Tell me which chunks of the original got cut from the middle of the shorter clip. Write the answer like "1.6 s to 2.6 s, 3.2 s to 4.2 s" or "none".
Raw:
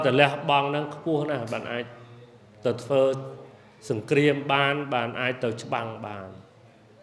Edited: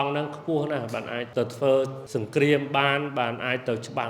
1.8 s to 2.5 s, 3.3 s to 3.8 s